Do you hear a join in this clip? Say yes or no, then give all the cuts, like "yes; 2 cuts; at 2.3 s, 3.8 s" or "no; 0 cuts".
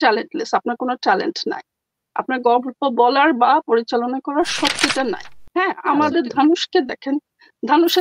yes; 1 cut; at 5.3 s